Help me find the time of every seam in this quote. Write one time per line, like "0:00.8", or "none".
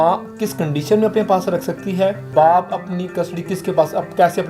0:02.2